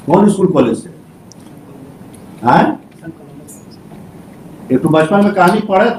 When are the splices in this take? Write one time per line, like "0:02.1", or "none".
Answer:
none

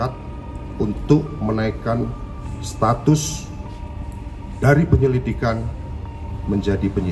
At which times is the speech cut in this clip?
none

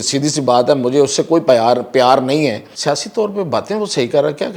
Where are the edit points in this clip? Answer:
0:02.7

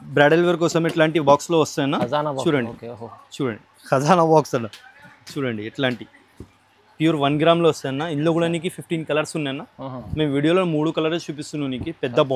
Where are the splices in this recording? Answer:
none

